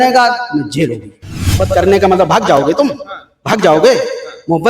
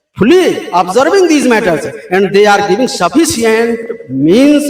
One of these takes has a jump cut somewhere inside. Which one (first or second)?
first